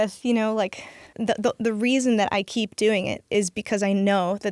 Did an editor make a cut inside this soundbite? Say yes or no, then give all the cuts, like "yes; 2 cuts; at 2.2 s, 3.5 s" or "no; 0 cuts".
yes; 1 cut; at 1.1 s